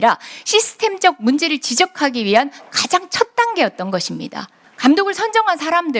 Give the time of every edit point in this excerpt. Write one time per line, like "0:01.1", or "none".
none